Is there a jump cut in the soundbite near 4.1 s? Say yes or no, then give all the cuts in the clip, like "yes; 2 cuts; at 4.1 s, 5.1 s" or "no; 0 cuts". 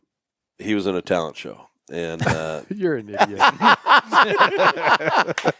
no; 0 cuts